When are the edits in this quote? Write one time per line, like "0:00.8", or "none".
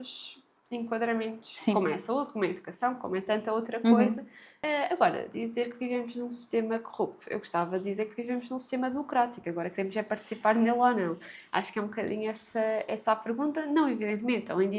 0:04.5